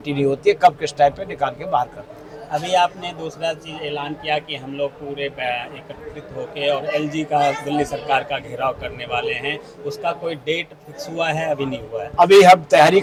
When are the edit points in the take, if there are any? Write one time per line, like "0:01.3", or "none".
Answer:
none